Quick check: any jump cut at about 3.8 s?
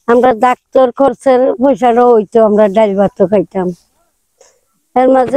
no; 0 cuts

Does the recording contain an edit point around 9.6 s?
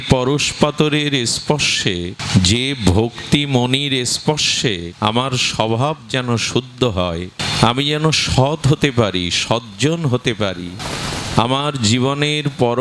no; 4 cuts; at 2.2 s, 4.9 s, 7.4 s, 10.8 s

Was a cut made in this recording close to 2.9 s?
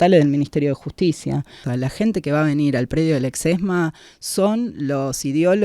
no; 1 cut; at 1.6 s

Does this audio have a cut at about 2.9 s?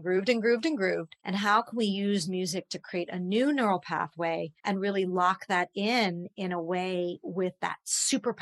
no; 2 cuts; at 1.1 s, 4.5 s

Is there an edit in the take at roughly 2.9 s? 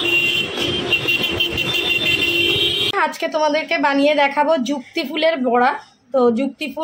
yes; 1 cut; at 2.9 s

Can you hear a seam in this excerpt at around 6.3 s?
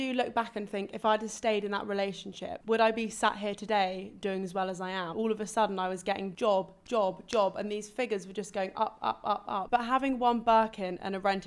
yes; 4 cuts; at 2.5 s, 5.1 s, 6.3 s, 9.7 s

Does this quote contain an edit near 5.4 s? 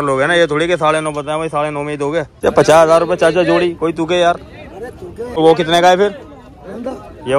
yes; 2 cuts; at 2.3 s, 5.4 s

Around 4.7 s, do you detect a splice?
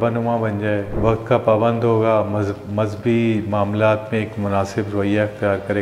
no; 1 cut; at 0.9 s

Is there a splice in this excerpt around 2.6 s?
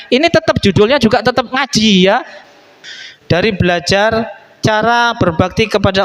yes; 1 cut; at 2.6 s

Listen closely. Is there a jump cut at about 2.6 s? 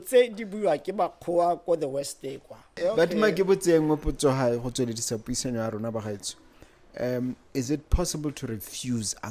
yes; 1 cut; at 2.6 s

